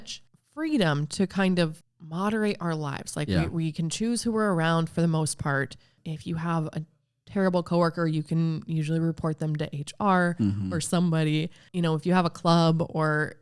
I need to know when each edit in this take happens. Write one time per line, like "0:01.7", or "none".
0:01.8
0:06.0
0:11.6